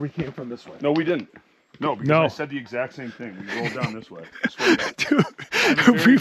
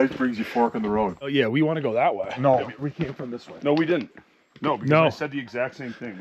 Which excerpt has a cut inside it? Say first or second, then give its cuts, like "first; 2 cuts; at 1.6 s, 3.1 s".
second; 1 cut; at 1.3 s